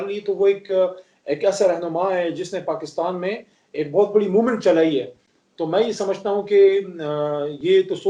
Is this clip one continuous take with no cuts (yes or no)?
yes